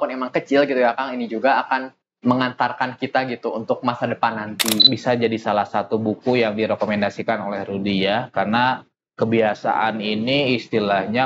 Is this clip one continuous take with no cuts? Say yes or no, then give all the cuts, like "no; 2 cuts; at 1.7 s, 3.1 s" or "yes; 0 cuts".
no; 1 cut; at 4.8 s